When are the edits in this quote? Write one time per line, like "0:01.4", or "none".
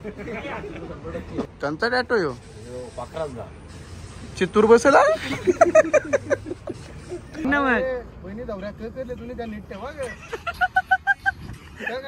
0:01.5
0:07.4